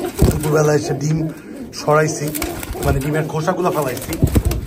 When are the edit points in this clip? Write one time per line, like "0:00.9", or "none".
none